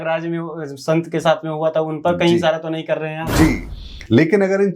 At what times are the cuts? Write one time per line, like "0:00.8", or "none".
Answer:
0:03.7